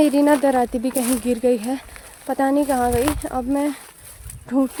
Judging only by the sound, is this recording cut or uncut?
uncut